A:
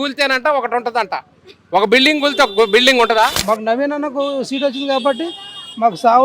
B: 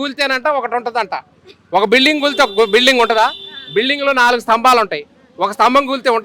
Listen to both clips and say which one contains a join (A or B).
A